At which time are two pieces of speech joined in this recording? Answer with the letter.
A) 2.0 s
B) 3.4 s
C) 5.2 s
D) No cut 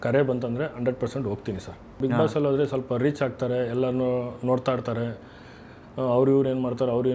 A